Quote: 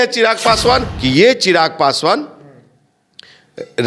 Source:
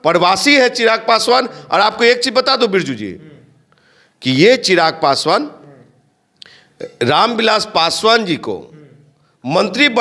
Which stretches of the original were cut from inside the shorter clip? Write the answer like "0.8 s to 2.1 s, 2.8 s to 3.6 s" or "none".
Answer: 1.5 s to 4.1 s